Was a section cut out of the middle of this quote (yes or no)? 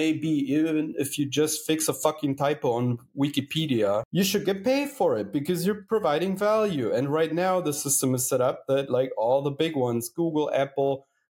yes